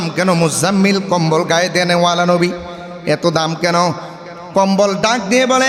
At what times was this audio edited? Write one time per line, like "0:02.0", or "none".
none